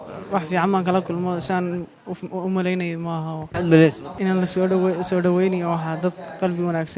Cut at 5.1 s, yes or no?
no